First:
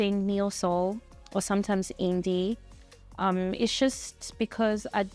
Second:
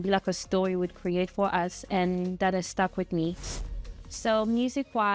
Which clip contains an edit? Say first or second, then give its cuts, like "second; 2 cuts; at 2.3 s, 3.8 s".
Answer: second; 1 cut; at 3.6 s